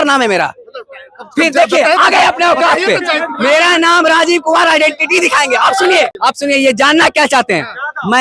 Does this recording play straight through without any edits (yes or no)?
no